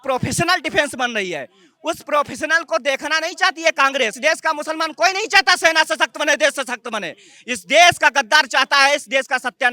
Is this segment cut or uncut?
uncut